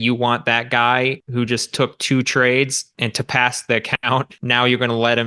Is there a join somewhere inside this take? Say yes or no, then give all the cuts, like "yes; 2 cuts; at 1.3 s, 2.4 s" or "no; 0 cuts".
yes; 3 cuts; at 1.2 s, 2.9 s, 4.4 s